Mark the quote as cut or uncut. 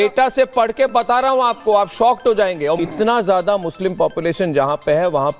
cut